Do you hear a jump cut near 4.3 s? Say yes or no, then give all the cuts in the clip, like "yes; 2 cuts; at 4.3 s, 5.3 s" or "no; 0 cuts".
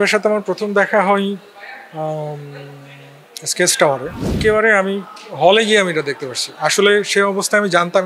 yes; 1 cut; at 4.3 s